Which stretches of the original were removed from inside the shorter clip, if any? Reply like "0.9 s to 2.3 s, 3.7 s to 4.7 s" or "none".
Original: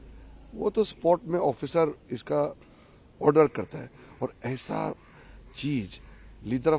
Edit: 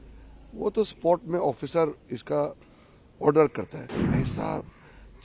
4.0 s to 4.4 s